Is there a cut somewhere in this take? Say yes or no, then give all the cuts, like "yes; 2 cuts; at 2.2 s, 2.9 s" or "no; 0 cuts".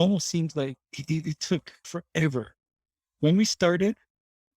yes; 1 cut; at 1.9 s